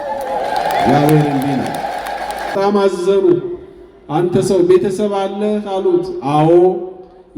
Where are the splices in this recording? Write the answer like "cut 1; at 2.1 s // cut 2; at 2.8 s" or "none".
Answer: cut 1; at 2.5 s